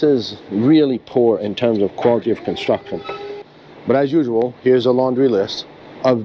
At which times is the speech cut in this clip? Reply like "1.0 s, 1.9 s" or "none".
3.4 s

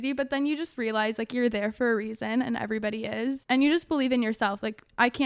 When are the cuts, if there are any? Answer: 3.4 s

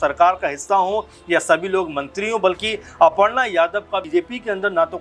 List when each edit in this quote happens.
4.1 s

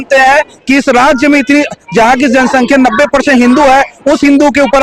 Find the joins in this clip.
none

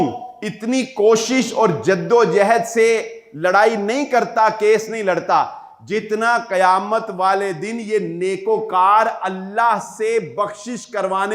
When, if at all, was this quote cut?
none

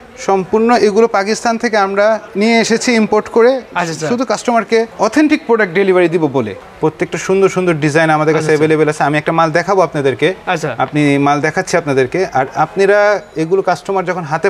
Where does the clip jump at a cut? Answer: 4.9 s, 6.6 s

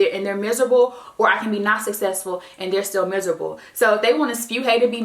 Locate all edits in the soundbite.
none

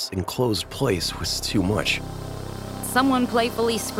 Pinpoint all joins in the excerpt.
2.6 s

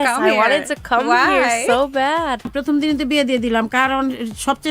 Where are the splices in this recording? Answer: 2.6 s

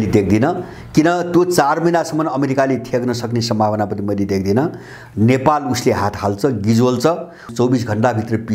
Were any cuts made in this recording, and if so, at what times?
7.5 s

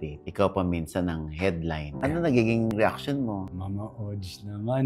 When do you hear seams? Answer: 2.0 s, 3.5 s

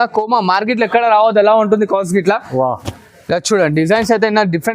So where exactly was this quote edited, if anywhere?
none

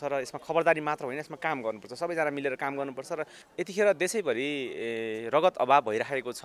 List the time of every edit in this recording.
3.4 s

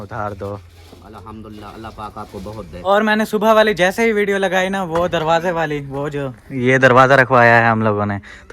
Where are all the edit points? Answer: 2.7 s

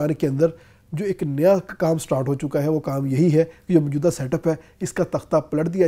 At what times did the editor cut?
none

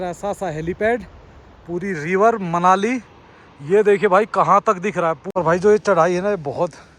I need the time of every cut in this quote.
5.2 s

